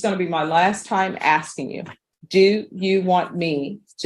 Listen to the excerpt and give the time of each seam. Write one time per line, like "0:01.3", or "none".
none